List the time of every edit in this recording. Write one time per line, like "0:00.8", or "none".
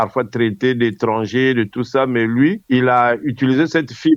none